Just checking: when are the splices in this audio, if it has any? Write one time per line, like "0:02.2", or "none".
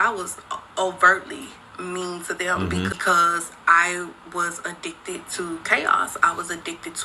0:02.9

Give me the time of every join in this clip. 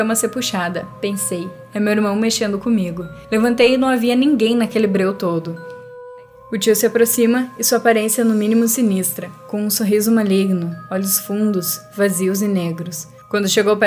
0:05.8

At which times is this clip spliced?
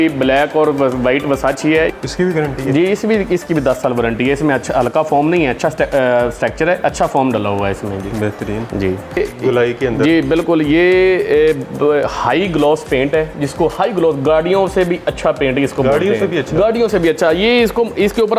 0:01.9
0:09.2

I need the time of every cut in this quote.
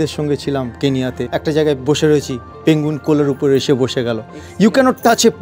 0:01.3

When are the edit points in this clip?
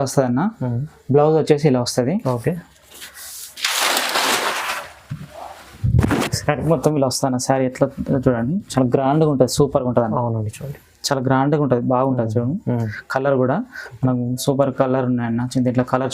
none

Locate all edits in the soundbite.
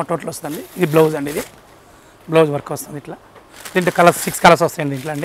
none

